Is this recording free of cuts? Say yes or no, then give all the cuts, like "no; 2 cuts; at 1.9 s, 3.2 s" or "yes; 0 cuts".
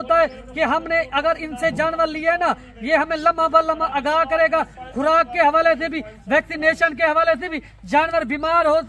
yes; 0 cuts